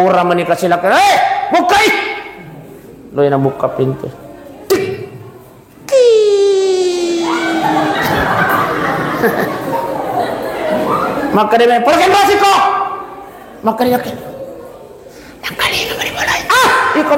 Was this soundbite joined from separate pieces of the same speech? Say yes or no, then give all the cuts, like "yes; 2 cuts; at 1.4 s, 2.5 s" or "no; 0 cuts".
no; 0 cuts